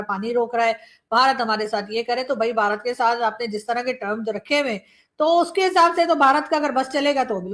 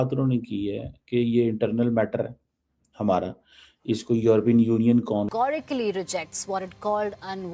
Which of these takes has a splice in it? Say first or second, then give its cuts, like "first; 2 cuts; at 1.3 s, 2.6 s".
second; 1 cut; at 5.3 s